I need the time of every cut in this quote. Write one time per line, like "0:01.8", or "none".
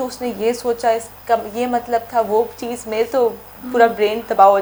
none